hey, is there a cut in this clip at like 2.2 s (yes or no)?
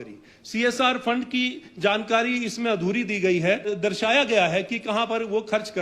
no